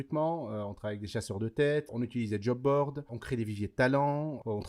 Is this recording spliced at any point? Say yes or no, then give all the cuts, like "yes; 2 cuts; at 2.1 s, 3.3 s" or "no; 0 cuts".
yes; 2 cuts; at 1.9 s, 3.1 s